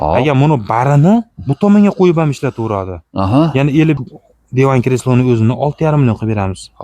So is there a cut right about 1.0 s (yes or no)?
no